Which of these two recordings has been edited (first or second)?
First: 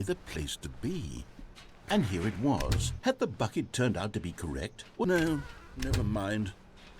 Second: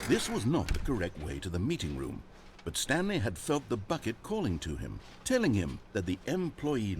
first